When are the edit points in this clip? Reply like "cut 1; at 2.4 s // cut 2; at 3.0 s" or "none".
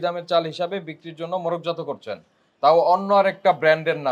none